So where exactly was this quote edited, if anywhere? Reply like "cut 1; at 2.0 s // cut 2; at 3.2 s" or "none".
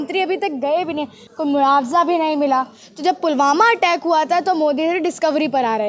cut 1; at 1.2 s // cut 2; at 2.8 s